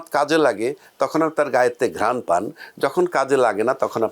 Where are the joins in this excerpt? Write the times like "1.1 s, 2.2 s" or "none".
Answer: none